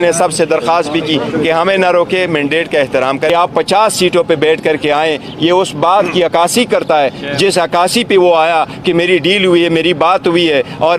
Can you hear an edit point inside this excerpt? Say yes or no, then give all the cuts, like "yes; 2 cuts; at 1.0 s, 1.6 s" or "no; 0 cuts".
yes; 1 cut; at 3.3 s